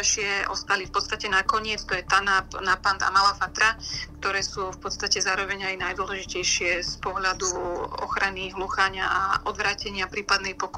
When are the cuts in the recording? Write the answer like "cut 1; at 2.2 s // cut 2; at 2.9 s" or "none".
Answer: none

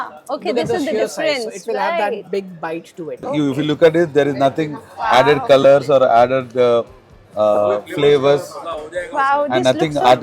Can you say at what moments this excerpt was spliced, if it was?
cut 1; at 3.3 s

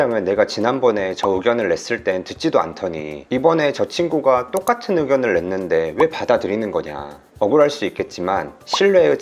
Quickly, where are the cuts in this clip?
none

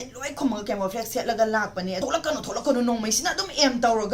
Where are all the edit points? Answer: cut 1; at 2.0 s

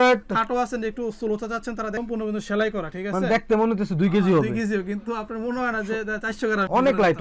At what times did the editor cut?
none

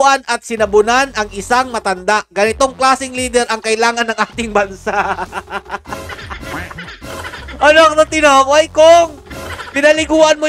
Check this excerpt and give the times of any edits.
none

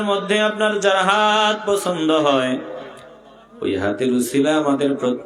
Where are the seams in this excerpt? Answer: none

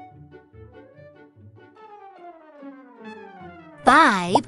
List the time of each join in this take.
cut 1; at 2.8 s

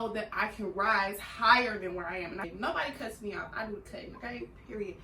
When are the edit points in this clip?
cut 1; at 2.5 s

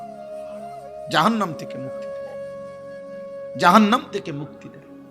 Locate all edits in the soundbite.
cut 1; at 2.0 s // cut 2; at 3.6 s

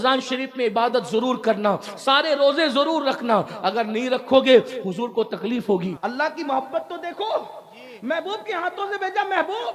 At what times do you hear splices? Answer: cut 1; at 5.9 s

